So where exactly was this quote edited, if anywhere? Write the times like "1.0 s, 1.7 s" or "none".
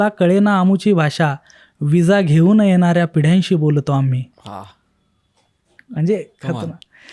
none